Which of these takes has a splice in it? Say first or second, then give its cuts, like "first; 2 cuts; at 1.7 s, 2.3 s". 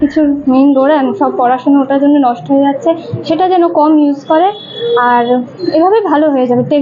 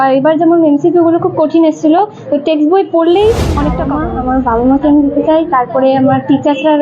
second; 1 cut; at 3.8 s